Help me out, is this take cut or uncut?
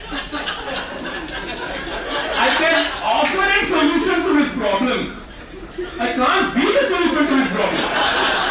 uncut